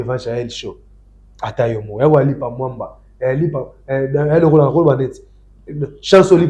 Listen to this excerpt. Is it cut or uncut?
uncut